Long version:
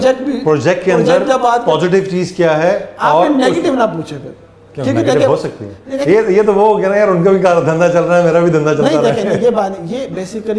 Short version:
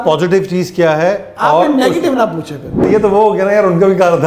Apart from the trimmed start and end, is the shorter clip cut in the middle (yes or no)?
yes